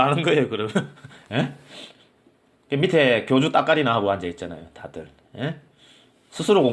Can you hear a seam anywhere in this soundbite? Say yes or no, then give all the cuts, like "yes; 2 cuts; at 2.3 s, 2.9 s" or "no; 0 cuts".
no; 0 cuts